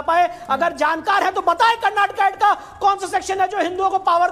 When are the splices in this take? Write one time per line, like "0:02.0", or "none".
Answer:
none

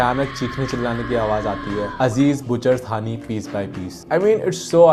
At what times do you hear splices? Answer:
none

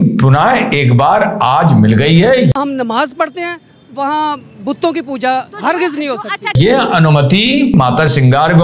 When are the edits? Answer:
0:02.5
0:06.6
0:07.7

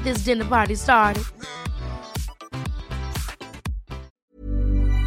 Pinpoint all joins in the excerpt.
0:04.1

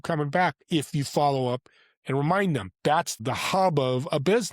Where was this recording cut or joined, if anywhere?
0:03.1

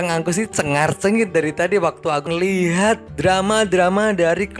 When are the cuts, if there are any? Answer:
0:02.3

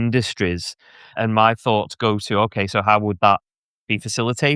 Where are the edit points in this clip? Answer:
0:01.2

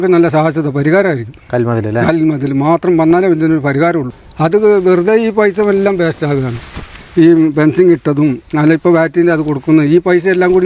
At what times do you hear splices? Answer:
0:04.2

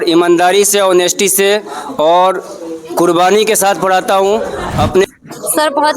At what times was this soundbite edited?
0:05.1

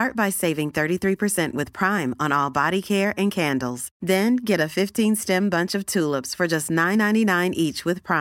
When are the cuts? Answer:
none

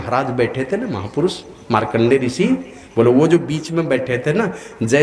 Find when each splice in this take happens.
none

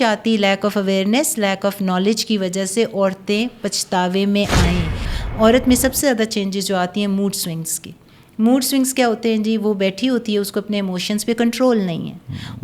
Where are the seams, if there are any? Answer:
0:05.0

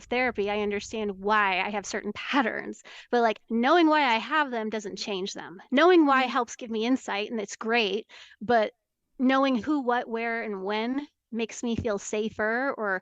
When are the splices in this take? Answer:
none

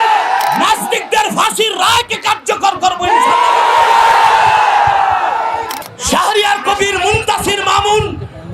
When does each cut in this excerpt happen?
0:05.7

